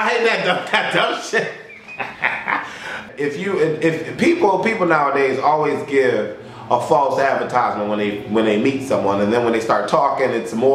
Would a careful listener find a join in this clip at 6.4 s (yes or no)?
no